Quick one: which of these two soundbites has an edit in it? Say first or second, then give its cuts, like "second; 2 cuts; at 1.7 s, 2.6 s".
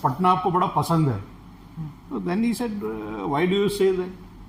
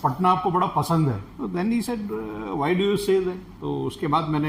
second; 2 cuts; at 1.3 s, 3.5 s